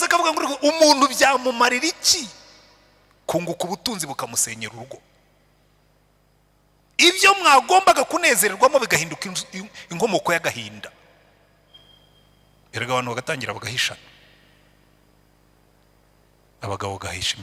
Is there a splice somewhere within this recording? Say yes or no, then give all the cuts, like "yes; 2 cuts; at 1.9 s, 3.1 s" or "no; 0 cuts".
no; 0 cuts